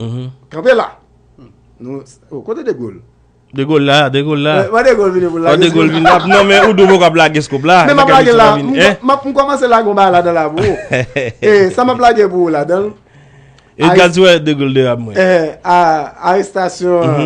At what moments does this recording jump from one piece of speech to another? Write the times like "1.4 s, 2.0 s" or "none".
none